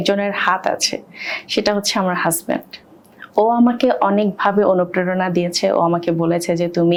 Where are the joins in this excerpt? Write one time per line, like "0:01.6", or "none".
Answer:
none